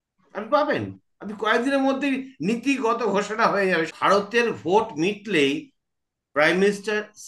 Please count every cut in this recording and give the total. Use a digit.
1